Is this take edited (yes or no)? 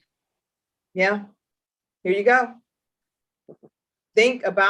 no